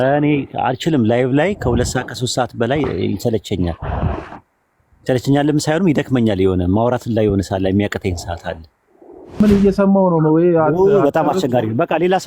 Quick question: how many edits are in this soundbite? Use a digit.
1